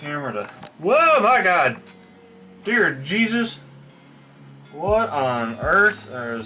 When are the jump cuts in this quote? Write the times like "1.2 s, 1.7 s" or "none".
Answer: none

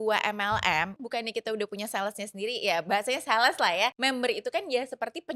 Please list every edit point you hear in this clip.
0.9 s, 4.0 s

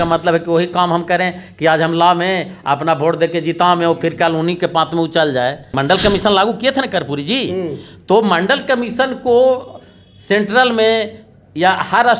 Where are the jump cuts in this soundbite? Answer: 5.7 s

